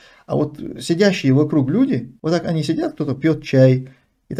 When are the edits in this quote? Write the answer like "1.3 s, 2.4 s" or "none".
2.1 s